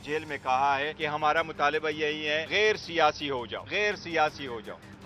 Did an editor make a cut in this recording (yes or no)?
yes